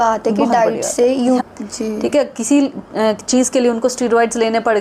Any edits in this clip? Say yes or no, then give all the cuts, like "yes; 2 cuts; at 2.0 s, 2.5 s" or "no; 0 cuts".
yes; 1 cut; at 1.4 s